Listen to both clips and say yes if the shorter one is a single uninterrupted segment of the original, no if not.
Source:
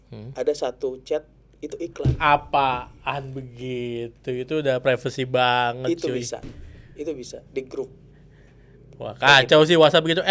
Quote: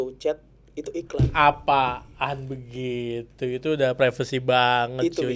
yes